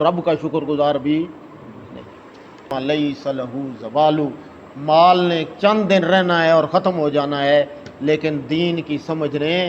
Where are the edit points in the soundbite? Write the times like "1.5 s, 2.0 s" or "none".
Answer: 2.7 s